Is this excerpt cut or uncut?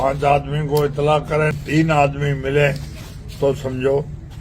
cut